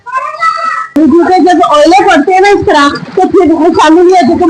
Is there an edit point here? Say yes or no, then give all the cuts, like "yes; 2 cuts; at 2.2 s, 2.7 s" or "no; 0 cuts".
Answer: yes; 1 cut; at 1.0 s